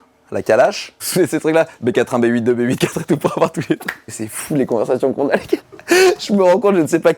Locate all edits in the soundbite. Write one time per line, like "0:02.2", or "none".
0:01.0
0:04.2